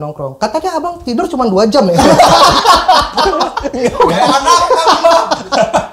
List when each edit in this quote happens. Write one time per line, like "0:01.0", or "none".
none